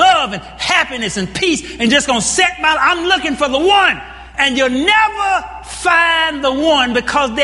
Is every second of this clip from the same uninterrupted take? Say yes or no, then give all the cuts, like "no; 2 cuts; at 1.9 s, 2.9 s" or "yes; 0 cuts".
yes; 0 cuts